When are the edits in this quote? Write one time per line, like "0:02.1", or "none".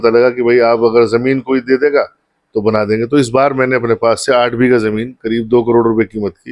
none